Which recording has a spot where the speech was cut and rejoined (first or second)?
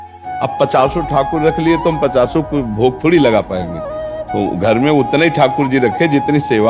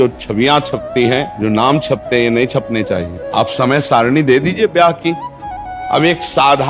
second